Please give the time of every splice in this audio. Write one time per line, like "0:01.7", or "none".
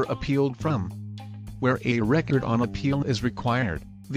0:03.2